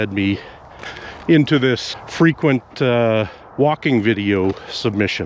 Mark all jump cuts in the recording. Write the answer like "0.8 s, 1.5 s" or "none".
2.0 s, 3.4 s